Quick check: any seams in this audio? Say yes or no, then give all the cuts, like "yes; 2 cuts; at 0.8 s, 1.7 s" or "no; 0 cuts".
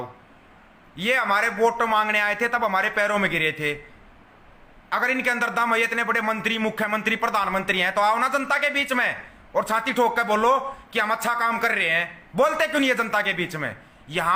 no; 0 cuts